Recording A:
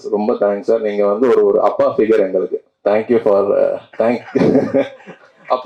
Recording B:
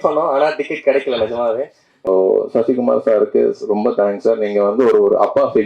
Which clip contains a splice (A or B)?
B